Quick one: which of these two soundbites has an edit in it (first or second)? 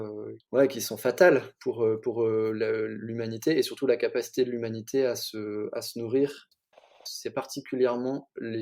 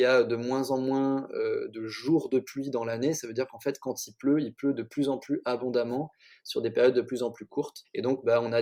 first